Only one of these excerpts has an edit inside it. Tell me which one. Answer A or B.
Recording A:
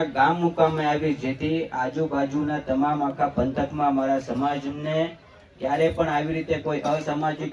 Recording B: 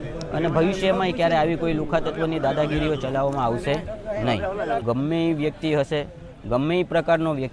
B